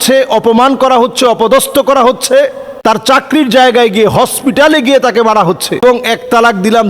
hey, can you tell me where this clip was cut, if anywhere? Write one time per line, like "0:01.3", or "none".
0:02.7
0:05.8